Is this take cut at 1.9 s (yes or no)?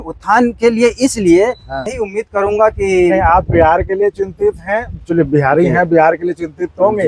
yes